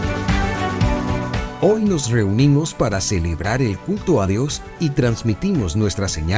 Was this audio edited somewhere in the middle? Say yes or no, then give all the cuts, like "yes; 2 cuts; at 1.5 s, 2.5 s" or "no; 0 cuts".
yes; 1 cut; at 1.5 s